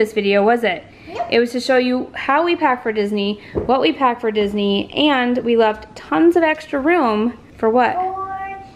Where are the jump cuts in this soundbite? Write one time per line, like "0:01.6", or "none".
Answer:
0:07.5